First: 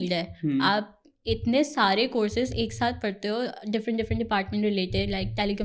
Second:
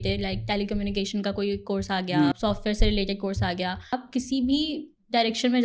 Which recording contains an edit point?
second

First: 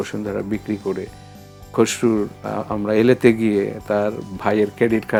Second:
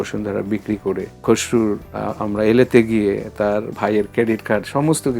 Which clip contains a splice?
second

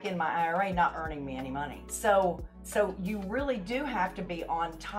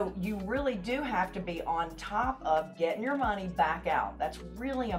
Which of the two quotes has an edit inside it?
first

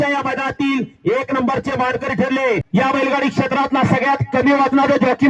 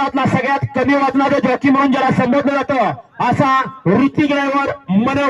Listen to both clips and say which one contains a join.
first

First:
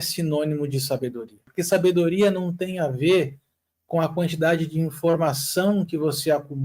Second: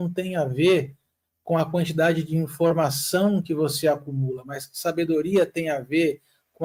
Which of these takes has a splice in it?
first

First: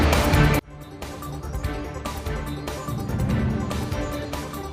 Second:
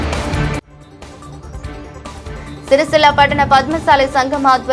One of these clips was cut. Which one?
first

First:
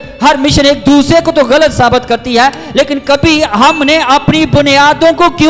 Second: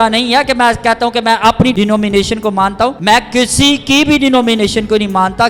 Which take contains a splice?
second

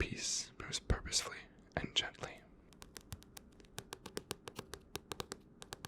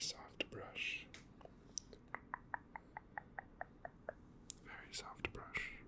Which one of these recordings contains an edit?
first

